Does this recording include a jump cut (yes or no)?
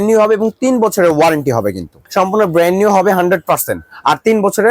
yes